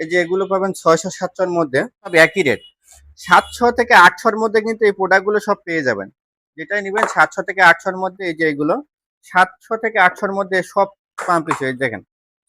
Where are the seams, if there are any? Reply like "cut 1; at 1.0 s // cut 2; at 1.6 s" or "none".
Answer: cut 1; at 2.1 s